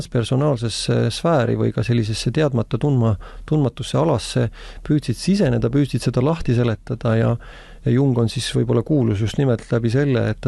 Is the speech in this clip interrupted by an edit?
no; 0 cuts

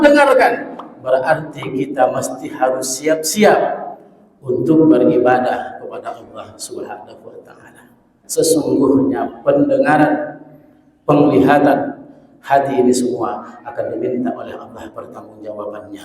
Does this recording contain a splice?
yes; 1 cut; at 8.2 s

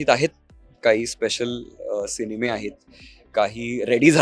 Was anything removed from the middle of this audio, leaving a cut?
no; 0 cuts

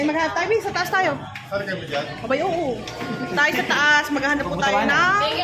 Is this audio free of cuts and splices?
yes; 0 cuts

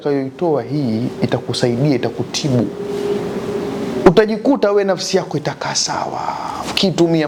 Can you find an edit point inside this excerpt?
no; 0 cuts

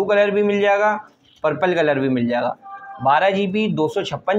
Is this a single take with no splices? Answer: yes; 0 cuts

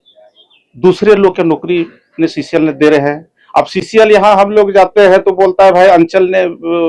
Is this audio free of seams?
yes; 0 cuts

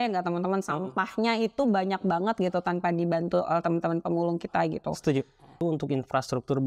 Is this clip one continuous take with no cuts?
no; 1 cut; at 5.5 s

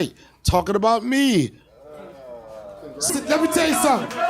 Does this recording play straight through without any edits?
no; 1 cut; at 3.1 s

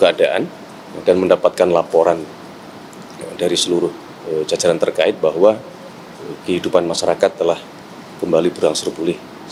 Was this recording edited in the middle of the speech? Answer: no; 0 cuts

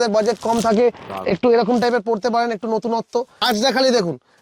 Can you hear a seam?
yes; 1 cut; at 3.3 s

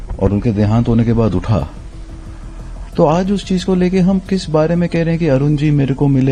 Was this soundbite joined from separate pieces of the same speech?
no; 0 cuts

